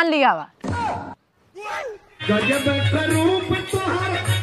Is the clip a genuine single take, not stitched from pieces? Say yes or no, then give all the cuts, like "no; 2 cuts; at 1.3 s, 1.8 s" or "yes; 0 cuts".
yes; 0 cuts